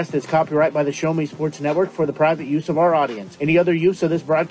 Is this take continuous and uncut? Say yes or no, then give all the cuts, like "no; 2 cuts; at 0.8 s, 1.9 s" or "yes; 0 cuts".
yes; 0 cuts